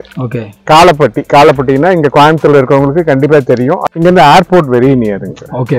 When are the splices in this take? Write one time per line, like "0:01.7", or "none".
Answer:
0:03.8